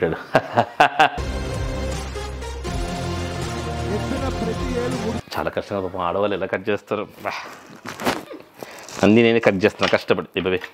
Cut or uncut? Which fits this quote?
uncut